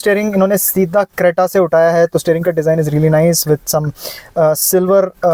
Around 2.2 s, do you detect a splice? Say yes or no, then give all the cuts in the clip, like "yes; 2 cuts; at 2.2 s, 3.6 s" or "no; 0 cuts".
no; 0 cuts